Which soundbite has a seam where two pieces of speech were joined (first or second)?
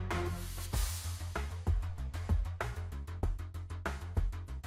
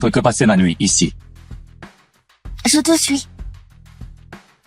second